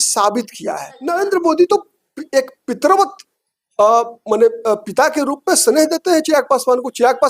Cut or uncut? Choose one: cut